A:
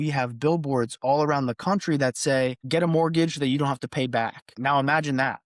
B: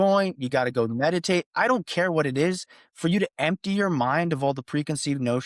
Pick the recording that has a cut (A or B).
A